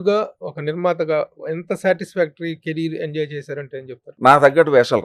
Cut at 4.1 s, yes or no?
yes